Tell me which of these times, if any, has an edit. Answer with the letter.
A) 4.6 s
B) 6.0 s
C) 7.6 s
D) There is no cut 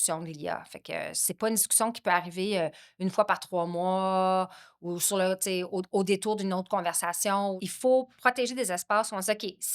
C